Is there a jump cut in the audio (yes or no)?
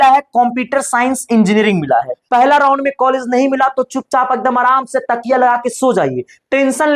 yes